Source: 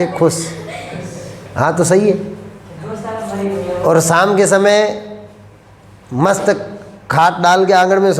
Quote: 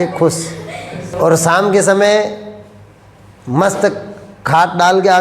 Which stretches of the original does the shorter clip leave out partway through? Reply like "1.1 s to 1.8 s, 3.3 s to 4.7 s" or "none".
1.1 s to 3.7 s